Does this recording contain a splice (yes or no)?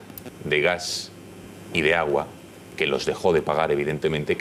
no